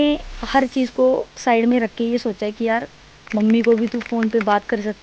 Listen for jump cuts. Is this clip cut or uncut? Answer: uncut